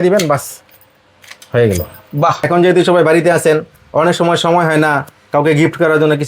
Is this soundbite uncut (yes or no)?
no